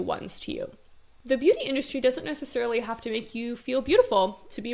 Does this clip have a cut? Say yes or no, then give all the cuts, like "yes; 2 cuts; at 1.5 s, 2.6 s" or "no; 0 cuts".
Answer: yes; 1 cut; at 1.2 s